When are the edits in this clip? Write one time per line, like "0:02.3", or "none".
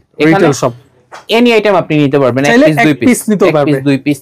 none